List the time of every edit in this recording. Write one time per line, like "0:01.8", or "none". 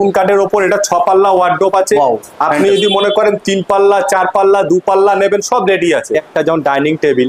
0:06.3